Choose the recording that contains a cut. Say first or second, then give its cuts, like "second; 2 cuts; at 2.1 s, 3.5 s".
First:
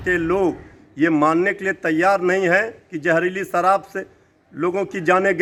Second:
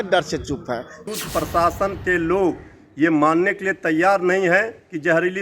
second; 1 cut; at 1.1 s